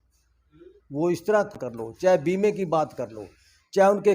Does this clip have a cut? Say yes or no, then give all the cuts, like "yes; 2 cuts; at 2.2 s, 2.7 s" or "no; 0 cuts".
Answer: yes; 1 cut; at 1.6 s